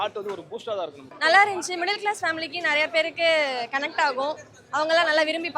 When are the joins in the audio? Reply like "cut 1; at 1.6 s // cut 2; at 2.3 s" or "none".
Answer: cut 1; at 1.0 s